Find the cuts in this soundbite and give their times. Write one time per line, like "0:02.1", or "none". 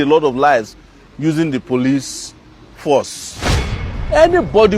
0:03.8